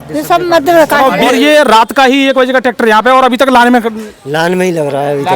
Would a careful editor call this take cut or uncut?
cut